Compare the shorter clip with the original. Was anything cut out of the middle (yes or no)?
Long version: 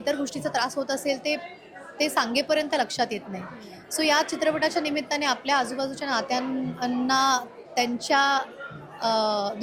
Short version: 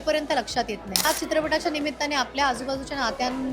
yes